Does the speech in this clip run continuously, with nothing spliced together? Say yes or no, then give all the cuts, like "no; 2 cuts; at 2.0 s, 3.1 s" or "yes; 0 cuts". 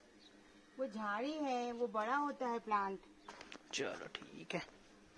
yes; 0 cuts